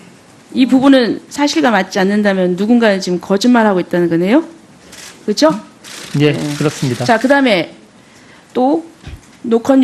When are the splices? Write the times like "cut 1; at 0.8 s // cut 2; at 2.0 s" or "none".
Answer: none